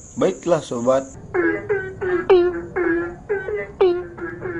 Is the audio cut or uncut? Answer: cut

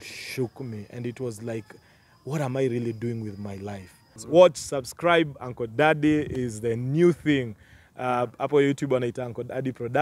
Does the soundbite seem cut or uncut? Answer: cut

